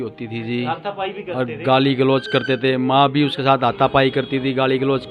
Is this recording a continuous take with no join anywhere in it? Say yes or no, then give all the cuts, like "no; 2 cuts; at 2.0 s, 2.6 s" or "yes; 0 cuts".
yes; 0 cuts